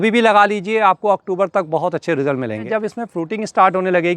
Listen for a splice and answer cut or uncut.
cut